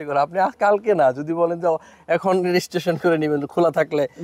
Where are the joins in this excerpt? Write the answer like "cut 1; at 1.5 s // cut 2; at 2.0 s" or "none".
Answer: none